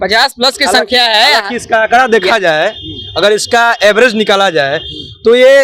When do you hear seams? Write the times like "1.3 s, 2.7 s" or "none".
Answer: none